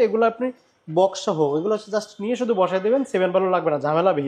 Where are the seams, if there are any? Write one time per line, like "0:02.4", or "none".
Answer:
none